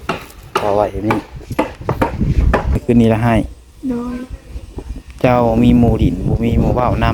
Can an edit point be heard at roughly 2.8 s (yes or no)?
yes